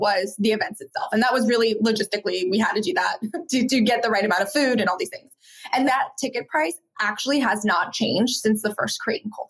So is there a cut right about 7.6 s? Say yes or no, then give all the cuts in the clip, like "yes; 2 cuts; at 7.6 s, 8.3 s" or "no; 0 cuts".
no; 1 cut; at 5.9 s